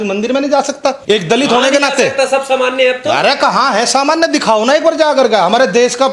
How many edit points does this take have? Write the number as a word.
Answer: one